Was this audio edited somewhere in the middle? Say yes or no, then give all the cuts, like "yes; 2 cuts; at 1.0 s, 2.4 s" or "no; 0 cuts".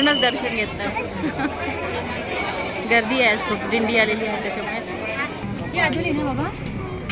yes; 1 cut; at 5.8 s